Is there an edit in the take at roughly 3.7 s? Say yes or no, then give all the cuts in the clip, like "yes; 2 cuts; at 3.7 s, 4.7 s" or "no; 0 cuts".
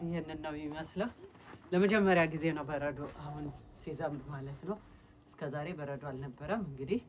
no; 0 cuts